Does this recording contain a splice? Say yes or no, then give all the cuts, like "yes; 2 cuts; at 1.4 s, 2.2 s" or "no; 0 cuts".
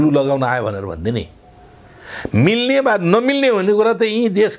no; 0 cuts